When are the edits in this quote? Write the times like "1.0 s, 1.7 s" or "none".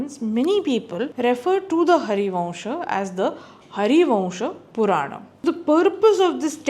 1.1 s, 5.4 s